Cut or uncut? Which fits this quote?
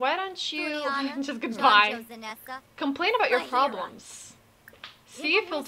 uncut